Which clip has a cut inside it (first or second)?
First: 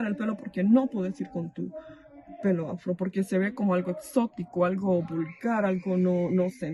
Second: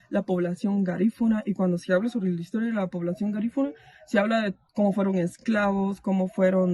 second